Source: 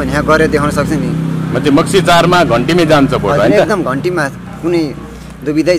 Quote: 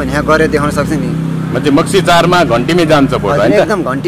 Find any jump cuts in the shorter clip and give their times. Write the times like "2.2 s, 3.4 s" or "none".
none